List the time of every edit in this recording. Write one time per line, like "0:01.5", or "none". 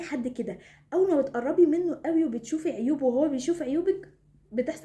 none